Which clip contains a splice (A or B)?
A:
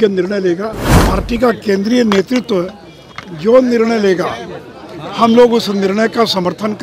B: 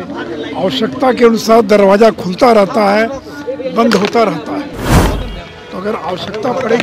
A